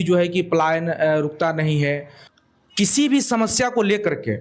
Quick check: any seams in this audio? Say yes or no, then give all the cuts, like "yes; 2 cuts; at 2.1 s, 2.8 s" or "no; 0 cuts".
yes; 1 cut; at 2.1 s